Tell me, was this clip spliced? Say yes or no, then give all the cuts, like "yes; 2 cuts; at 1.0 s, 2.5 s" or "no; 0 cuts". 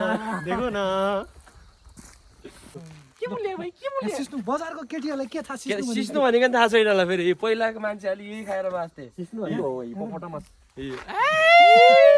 yes; 1 cut; at 3.0 s